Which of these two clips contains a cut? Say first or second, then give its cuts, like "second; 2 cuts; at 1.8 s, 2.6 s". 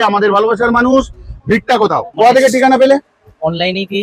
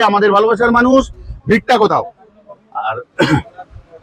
first; 1 cut; at 2.1 s